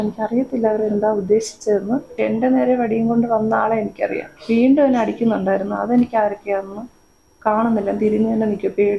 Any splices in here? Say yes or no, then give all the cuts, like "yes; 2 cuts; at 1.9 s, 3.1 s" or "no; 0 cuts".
yes; 2 cuts; at 2.1 s, 4.3 s